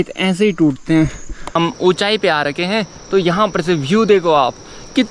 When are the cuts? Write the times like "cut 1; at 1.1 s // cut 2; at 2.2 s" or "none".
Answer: cut 1; at 1.5 s